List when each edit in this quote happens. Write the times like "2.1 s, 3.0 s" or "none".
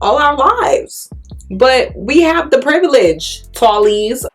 none